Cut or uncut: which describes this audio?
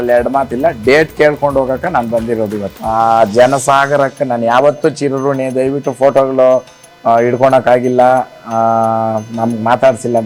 cut